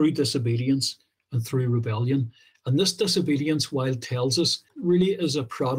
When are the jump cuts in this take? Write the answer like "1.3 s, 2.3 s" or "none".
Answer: 4.7 s